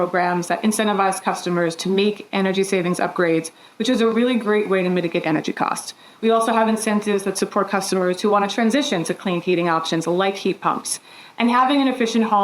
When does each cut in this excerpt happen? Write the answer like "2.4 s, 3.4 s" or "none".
4.1 s